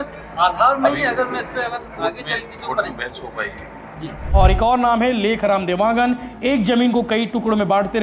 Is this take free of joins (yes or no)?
no